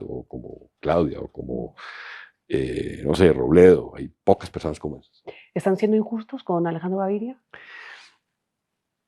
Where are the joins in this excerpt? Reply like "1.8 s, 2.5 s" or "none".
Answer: none